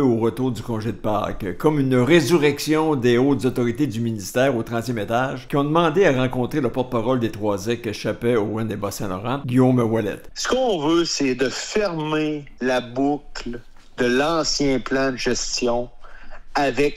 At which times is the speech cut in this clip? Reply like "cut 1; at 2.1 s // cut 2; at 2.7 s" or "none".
cut 1; at 10.3 s